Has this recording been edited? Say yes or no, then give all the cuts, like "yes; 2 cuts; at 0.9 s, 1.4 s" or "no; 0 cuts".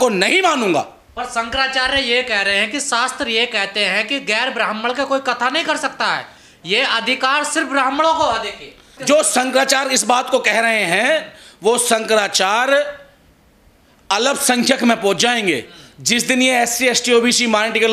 no; 0 cuts